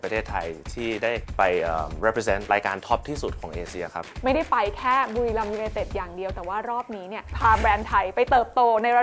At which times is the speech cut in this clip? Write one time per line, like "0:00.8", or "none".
0:01.3
0:02.5
0:04.1
0:07.3